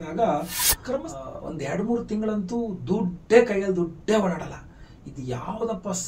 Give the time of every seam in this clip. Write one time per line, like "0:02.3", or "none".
0:01.0